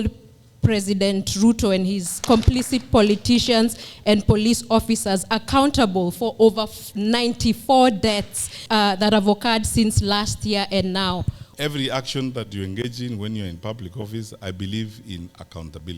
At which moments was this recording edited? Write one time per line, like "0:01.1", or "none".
0:02.2
0:08.5
0:11.5